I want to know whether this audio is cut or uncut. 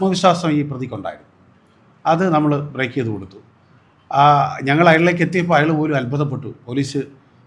uncut